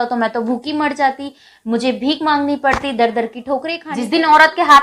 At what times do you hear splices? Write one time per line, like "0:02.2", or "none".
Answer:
0:03.8